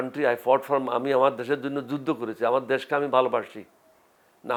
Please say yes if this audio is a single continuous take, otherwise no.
yes